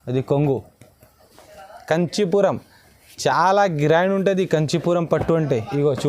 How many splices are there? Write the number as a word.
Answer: one